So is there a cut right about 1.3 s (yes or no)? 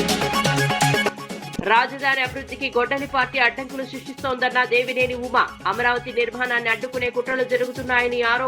yes